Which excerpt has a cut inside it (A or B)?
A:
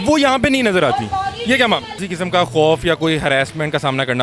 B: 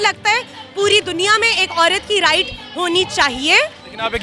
A